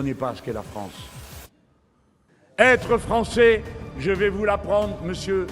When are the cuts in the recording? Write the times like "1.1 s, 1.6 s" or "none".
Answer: 2.3 s